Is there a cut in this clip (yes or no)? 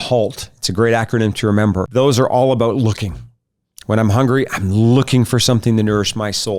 yes